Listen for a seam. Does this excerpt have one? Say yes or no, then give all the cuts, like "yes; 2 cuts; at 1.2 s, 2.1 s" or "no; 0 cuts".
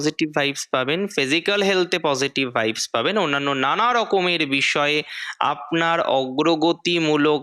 no; 0 cuts